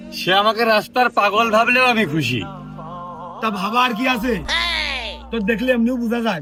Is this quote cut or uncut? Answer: uncut